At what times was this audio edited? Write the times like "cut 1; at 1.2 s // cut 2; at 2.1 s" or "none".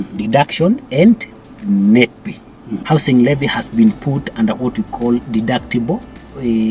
cut 1; at 2.8 s